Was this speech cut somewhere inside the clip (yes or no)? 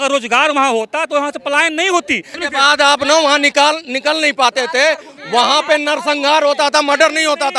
yes